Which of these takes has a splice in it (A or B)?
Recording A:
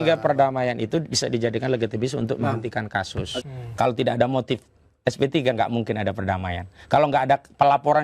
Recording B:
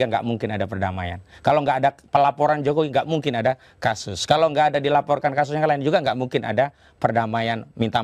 A